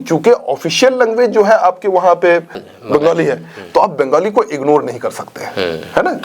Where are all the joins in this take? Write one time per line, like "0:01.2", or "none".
0:02.6